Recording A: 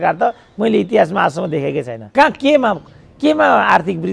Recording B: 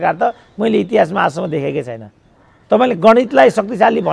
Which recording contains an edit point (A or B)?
A